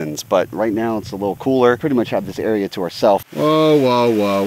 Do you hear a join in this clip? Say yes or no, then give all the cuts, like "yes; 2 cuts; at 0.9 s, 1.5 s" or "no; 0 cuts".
yes; 2 cuts; at 1.8 s, 3.3 s